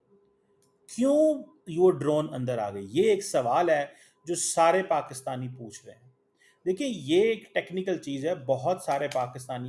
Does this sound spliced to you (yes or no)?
no